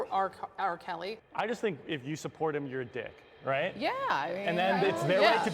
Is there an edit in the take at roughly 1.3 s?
yes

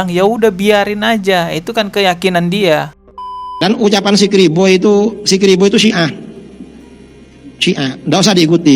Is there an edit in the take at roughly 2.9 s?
yes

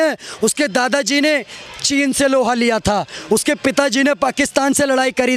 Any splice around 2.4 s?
no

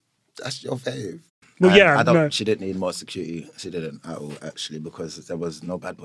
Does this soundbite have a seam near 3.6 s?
no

